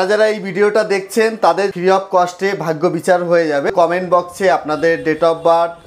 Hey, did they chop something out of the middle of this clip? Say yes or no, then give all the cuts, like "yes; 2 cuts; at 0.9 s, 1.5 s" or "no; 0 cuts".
yes; 2 cuts; at 1.7 s, 3.7 s